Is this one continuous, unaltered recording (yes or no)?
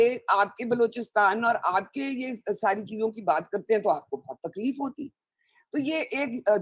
yes